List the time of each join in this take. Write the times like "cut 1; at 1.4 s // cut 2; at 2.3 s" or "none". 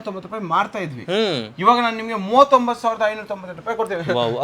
none